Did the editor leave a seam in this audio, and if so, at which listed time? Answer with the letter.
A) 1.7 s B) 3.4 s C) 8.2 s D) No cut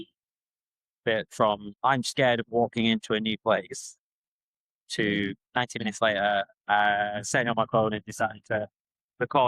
A